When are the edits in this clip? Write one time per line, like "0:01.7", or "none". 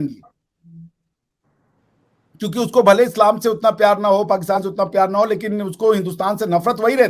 none

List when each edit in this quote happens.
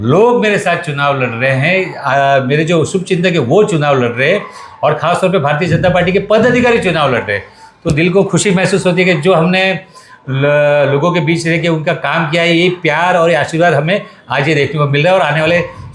none

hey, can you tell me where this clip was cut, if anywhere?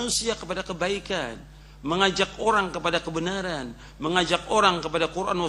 none

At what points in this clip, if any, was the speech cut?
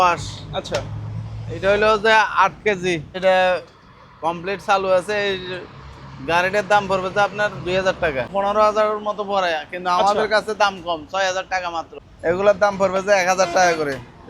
0:03.2
0:08.3
0:11.9

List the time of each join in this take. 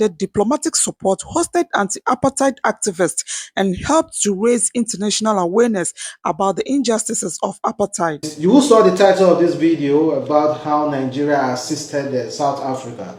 none

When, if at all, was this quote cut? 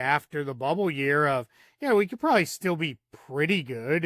none

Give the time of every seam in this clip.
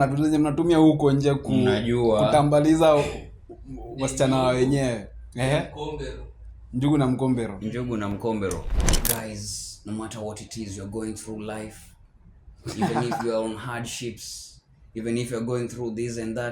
0:08.8

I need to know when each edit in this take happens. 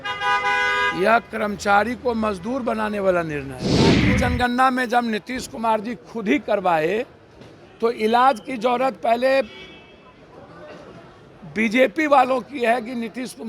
0:04.0

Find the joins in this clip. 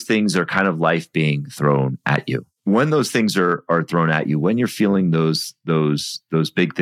0:02.5

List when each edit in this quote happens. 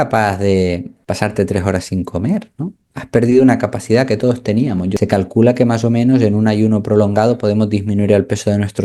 0:00.9
0:05.0

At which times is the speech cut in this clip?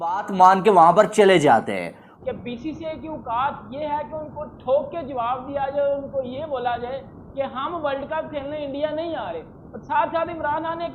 0:02.0

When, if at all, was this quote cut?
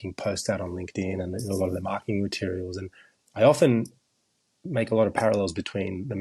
none

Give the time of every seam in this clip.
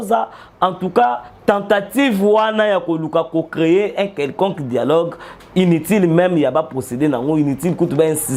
none

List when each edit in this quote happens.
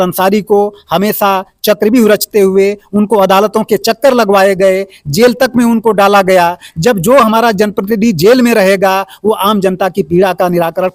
none

